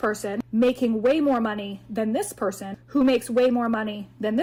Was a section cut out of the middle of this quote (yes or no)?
no